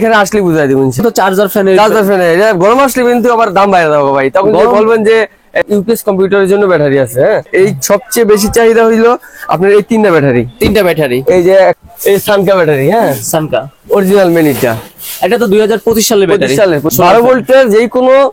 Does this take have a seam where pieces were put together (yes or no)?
yes